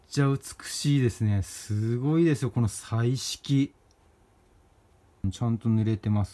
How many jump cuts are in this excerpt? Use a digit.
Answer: 1